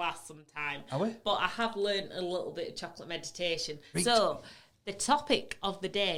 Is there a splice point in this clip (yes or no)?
yes